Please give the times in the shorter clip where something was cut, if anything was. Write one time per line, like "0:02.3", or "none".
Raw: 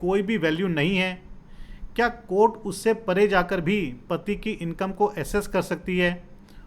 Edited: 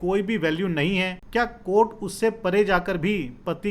0:01.2